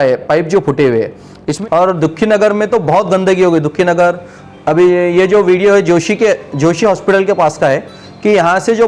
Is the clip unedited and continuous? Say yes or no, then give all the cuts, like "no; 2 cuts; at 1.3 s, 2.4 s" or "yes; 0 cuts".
no; 1 cut; at 1.5 s